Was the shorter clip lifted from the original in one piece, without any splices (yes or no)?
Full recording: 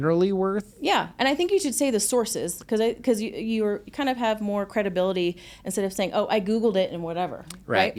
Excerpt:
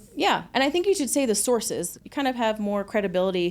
no